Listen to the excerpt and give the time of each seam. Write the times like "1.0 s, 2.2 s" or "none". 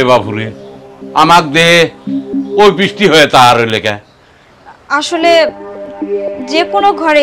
none